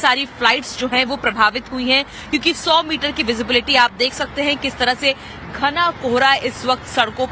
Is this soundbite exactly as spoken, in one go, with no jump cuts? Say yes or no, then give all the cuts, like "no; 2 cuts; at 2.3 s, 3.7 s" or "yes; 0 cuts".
yes; 0 cuts